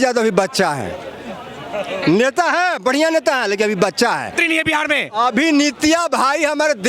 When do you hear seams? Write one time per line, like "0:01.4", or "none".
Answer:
0:04.4